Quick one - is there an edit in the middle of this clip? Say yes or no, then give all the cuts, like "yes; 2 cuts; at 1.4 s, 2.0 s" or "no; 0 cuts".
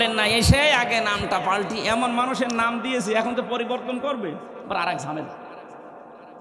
no; 0 cuts